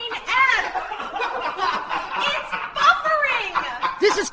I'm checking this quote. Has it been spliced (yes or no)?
no